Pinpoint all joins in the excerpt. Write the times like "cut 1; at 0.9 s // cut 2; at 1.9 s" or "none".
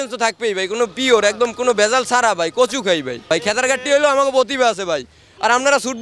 cut 1; at 3.2 s